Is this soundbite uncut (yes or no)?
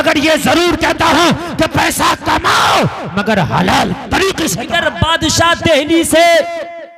no